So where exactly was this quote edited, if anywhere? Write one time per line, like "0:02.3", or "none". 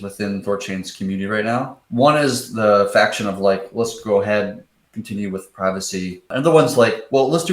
0:01.8
0:06.3

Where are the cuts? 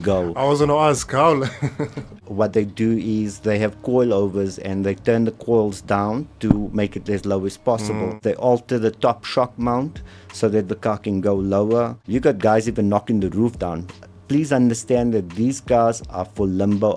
0:02.1
0:08.2
0:12.0

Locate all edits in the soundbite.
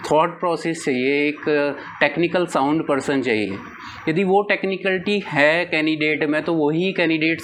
none

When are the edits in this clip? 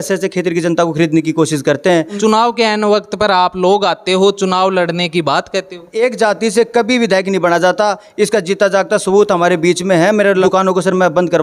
0:02.2
0:05.9
0:10.4

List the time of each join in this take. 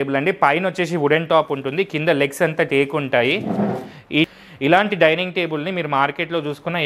0:04.3

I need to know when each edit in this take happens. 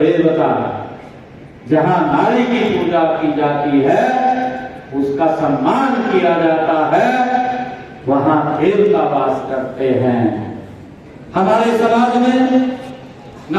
none

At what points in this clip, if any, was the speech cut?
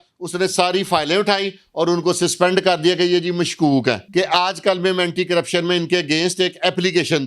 0:04.0

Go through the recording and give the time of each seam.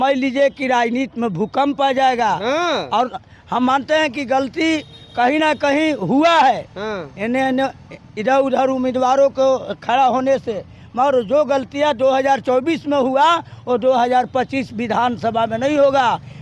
none

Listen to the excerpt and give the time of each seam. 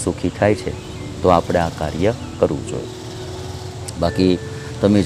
none

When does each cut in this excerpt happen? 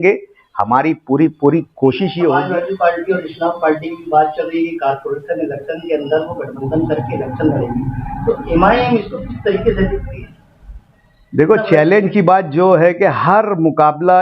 0:02.4
0:11.4

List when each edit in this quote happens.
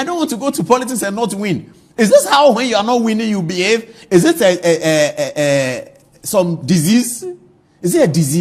none

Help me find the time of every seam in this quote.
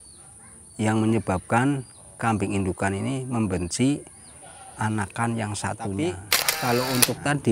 0:06.0

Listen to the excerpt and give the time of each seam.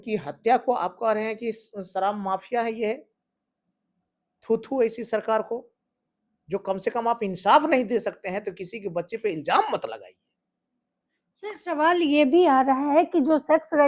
none

